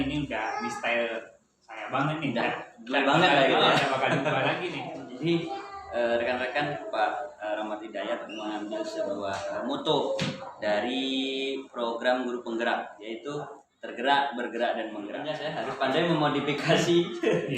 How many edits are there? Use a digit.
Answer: 2